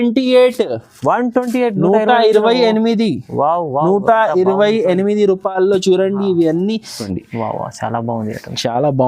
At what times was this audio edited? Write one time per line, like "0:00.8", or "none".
0:07.1